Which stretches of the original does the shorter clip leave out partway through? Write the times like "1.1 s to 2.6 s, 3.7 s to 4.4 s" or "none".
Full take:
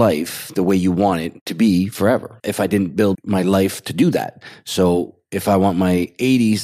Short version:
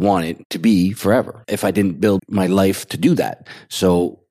none